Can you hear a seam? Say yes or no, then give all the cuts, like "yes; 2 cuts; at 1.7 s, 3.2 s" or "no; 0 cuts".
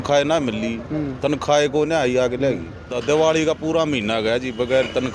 yes; 1 cut; at 2.9 s